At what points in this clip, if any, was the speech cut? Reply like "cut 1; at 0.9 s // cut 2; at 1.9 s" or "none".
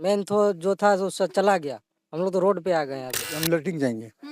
cut 1; at 3.3 s